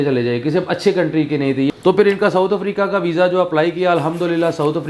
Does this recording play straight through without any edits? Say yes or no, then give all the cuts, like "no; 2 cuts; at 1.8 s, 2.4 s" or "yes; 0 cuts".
no; 1 cut; at 1.7 s